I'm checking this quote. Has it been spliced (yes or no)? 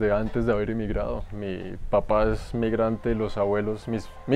no